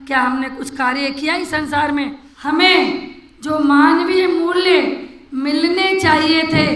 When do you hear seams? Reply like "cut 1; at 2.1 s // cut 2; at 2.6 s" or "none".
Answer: cut 1; at 2.3 s